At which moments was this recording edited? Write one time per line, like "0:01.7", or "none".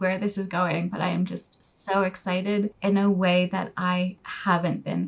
none